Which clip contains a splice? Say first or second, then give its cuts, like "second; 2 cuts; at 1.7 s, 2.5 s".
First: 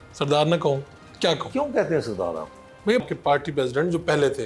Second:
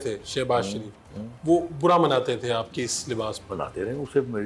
first; 1 cut; at 3.0 s